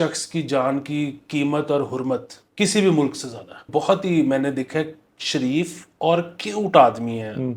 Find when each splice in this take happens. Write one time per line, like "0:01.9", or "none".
0:02.4
0:03.6